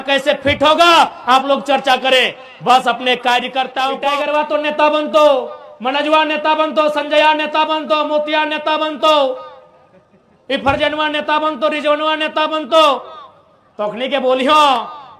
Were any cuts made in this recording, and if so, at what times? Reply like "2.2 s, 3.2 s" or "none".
4.1 s